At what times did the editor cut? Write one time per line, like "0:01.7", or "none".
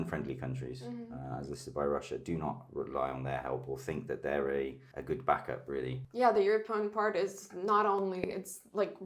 0:04.9
0:06.0